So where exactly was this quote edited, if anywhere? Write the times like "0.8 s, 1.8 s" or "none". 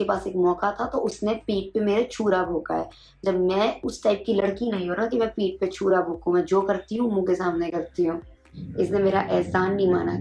8.6 s